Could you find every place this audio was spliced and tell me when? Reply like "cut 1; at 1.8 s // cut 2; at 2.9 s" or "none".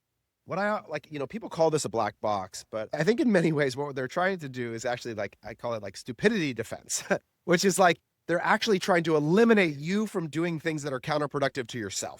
cut 1; at 2.9 s